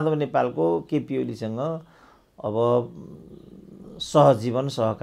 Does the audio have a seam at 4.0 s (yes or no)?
no